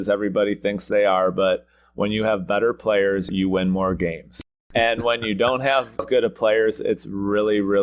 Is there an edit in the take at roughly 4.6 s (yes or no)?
yes